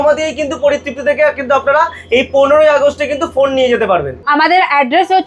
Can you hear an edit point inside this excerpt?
yes; 1 cut; at 4.1 s

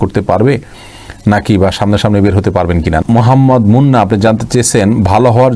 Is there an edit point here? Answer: yes; 1 cut; at 3.0 s

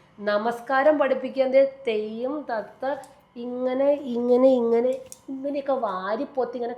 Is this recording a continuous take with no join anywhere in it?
yes; 0 cuts

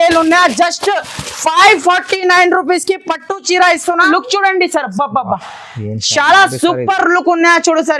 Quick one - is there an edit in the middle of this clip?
yes; 1 cut; at 4.1 s

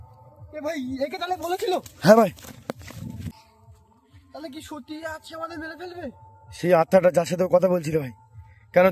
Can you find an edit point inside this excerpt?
yes; 1 cut; at 3.5 s

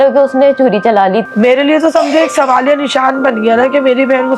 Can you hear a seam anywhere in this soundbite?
yes; 1 cut; at 1.2 s

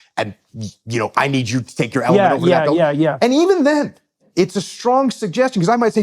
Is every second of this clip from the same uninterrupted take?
no; 1 cut; at 4.2 s

